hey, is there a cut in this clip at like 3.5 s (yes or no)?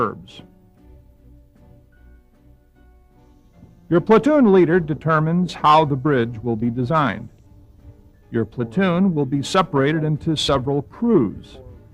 yes